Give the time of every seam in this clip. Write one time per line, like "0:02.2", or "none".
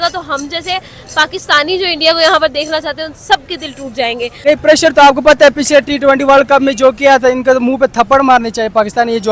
0:04.4